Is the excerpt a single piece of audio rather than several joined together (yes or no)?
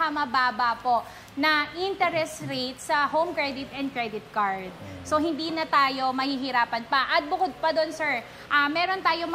yes